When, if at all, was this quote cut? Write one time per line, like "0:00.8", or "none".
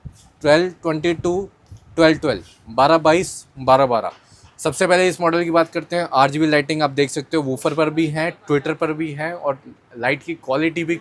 none